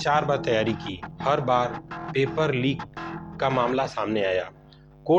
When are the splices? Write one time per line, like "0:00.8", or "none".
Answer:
none